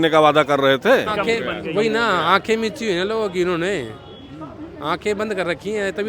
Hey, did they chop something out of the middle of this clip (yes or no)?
yes